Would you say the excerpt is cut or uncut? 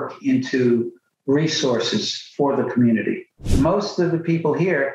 cut